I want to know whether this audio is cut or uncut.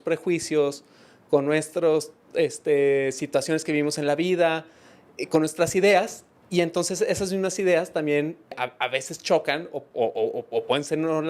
cut